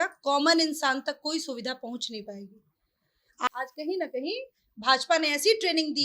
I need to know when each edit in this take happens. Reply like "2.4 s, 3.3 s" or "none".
3.5 s